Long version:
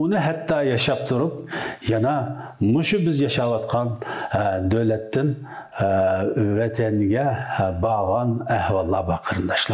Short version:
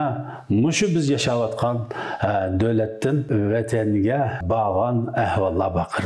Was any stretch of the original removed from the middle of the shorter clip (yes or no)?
yes